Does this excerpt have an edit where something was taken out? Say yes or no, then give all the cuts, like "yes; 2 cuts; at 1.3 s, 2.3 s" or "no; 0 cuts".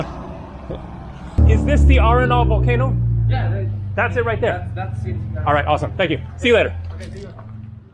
yes; 1 cut; at 1.4 s